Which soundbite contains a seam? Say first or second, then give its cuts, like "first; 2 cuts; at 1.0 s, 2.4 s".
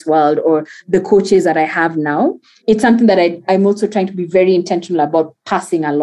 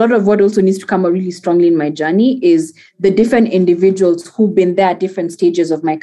first; 2 cuts; at 2.5 s, 3.4 s